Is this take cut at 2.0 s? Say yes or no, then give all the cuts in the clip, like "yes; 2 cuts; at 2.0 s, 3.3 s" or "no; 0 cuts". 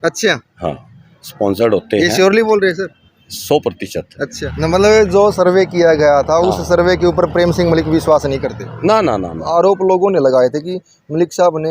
no; 2 cuts; at 4.4 s, 9.5 s